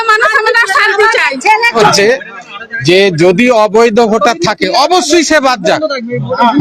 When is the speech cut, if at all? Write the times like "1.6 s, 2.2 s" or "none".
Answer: 1.8 s